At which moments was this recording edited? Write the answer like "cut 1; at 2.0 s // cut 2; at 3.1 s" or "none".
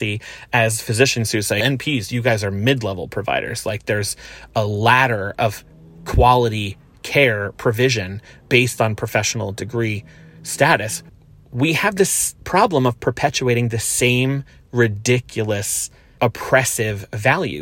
cut 1; at 11.0 s